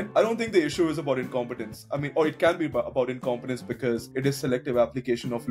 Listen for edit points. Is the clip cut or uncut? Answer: uncut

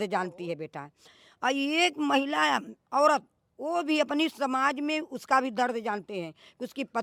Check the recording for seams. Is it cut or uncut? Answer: uncut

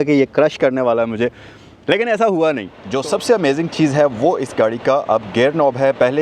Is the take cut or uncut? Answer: cut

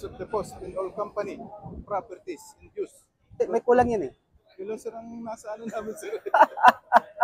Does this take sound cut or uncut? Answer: cut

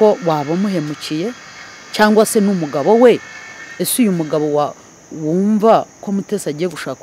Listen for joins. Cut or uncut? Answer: uncut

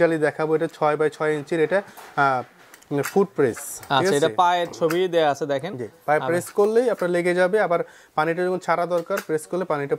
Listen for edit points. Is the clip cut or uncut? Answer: uncut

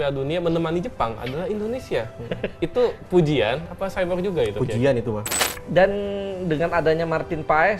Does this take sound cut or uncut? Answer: cut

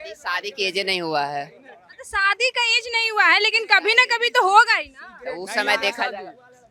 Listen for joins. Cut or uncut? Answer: uncut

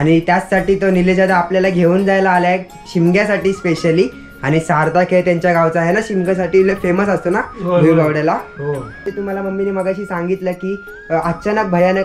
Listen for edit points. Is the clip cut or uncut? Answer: cut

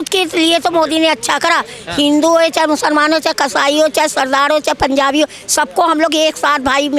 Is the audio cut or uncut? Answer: uncut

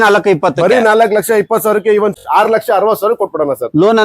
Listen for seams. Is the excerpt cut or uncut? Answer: cut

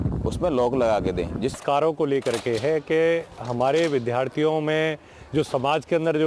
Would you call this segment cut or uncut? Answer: cut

